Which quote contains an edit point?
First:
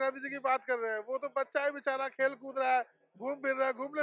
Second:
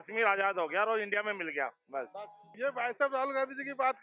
second; 1 cut; at 2.4 s

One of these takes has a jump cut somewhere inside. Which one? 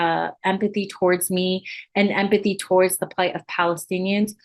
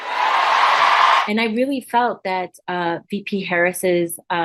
second; 1 cut; at 1.2 s

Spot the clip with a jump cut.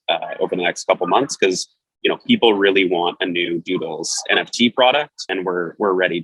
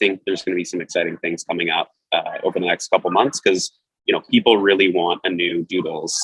first; 1 cut; at 5.3 s

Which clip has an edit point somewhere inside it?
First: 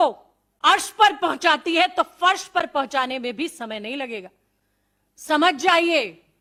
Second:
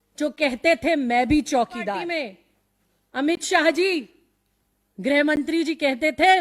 second; 1 cut; at 2.1 s

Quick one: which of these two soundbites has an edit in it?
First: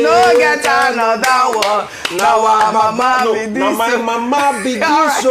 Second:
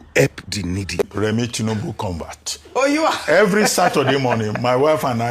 second; 1 cut; at 1.1 s

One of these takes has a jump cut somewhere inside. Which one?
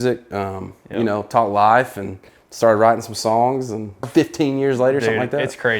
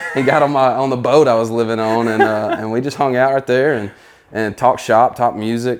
first; 1 cut; at 4.0 s

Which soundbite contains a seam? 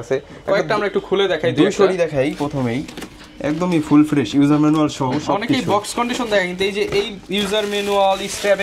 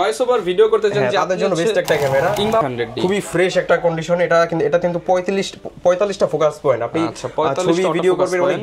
second; 1 cut; at 2.6 s

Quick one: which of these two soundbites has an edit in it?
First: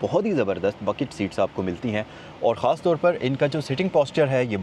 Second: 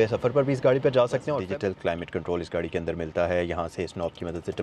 second; 1 cut; at 1.3 s

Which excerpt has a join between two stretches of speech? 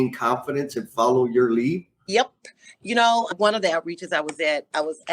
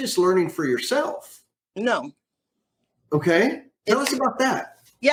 first; 1 cut; at 3.3 s

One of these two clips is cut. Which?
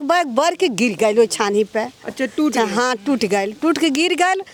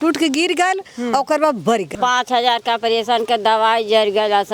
second; 1 cut; at 1.9 s

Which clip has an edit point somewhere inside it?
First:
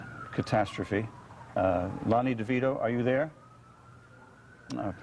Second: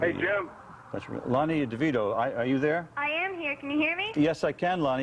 second; 1 cut; at 1.7 s

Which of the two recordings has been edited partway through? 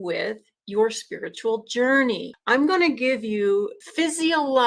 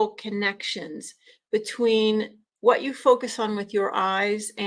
first; 2 cuts; at 2.3 s, 3.8 s

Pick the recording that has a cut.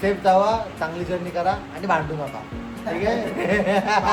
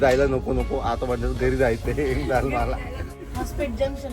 second; 1 cut; at 3.2 s

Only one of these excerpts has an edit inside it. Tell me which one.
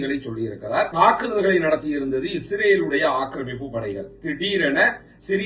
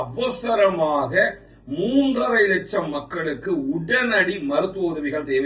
first; 1 cut; at 0.9 s

